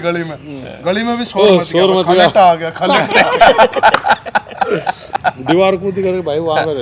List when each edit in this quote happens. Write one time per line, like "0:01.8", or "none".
0:05.2